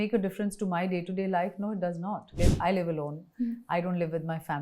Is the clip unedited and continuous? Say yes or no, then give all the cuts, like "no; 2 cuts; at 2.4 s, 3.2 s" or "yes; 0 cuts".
no; 1 cut; at 2.3 s